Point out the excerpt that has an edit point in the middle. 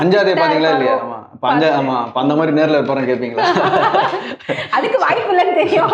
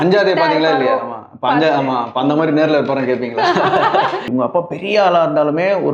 second; 1 cut; at 4.3 s

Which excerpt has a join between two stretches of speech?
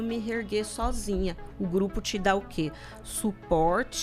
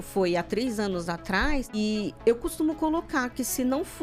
second; 1 cut; at 1.8 s

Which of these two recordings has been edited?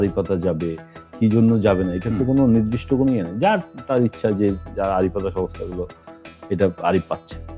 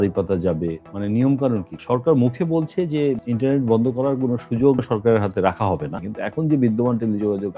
second; 5 cuts; at 0.9 s, 1.8 s, 3.2 s, 4.8 s, 6.0 s

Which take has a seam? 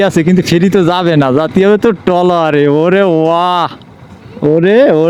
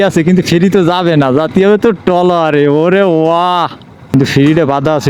second; 1 cut; at 4.0 s

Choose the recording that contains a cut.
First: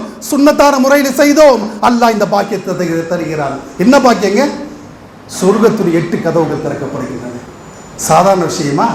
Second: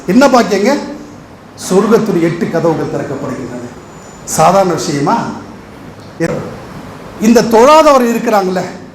second; 1 cut; at 6.2 s

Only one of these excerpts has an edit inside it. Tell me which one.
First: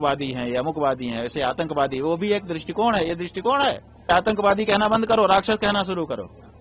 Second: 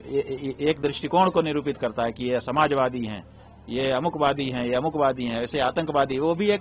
first; 1 cut; at 4.1 s

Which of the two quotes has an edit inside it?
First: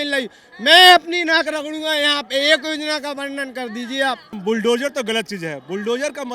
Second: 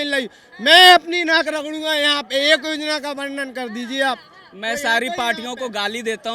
first; 1 cut; at 4.4 s

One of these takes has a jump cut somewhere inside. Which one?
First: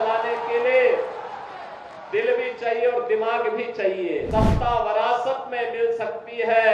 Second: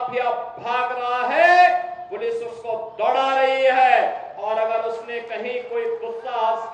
first; 1 cut; at 4.3 s

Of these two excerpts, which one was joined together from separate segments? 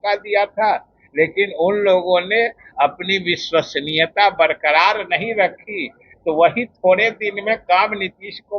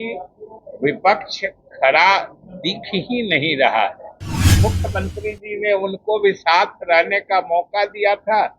second; 1 cut; at 4.6 s

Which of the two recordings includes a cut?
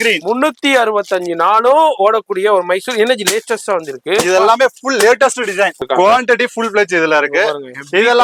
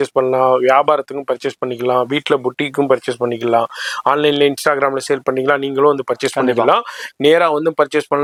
first; 1 cut; at 5.8 s

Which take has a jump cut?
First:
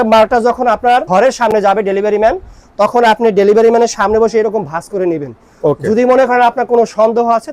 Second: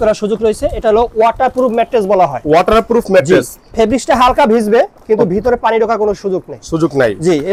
first; 1 cut; at 1.1 s

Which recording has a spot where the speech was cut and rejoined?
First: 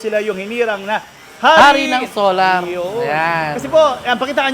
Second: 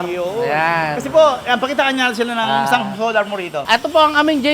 second; 1 cut; at 3.5 s

